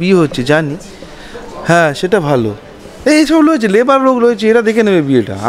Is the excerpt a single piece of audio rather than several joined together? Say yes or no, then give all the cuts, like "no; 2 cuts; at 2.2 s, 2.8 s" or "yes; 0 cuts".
yes; 0 cuts